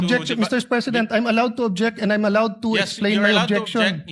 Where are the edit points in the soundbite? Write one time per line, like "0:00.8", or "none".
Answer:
none